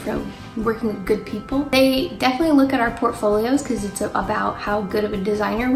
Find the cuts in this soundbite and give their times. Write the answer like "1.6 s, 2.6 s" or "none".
1.7 s